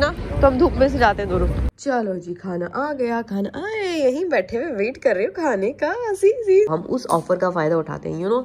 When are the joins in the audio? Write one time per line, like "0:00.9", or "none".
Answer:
0:01.7
0:06.7